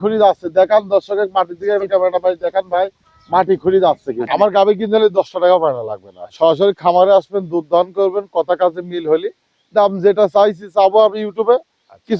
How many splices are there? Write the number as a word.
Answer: one